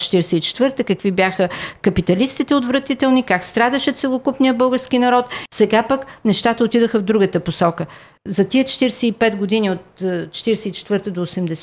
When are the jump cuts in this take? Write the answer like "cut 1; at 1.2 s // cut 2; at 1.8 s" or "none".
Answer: cut 1; at 5.4 s